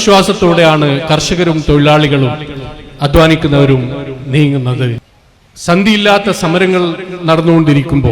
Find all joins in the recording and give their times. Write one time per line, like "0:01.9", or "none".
0:05.1